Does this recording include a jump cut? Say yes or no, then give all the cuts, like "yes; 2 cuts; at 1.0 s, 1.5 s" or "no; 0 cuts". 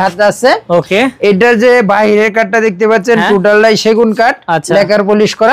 no; 0 cuts